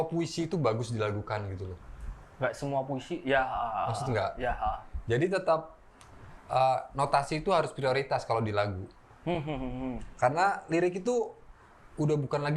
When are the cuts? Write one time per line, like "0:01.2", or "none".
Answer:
none